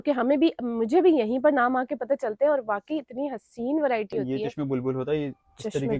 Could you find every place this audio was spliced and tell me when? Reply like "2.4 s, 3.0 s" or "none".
4.2 s